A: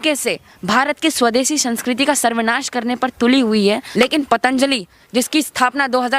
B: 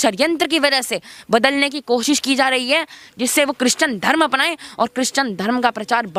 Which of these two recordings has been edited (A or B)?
A